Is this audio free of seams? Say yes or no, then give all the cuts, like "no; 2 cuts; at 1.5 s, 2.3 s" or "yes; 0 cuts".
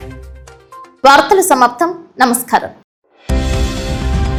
yes; 0 cuts